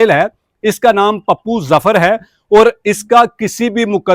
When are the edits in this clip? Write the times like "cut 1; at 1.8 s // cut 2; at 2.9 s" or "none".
none